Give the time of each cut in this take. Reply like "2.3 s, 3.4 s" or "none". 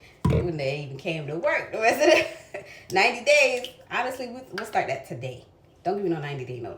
none